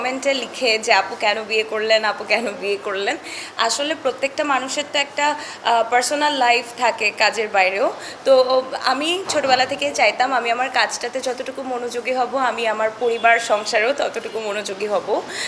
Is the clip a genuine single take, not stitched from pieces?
yes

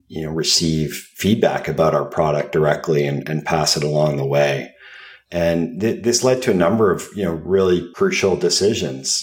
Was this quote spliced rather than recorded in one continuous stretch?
yes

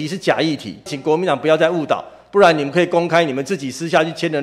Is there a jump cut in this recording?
yes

